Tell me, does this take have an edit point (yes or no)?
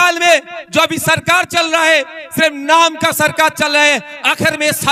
no